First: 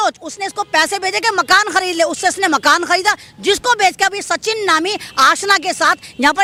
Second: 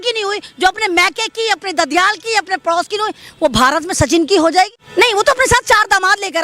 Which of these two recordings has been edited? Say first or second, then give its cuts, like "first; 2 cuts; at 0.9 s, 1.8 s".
second; 1 cut; at 4.8 s